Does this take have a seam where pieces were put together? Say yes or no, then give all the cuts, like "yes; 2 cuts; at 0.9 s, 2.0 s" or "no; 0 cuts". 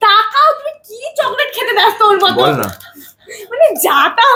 no; 0 cuts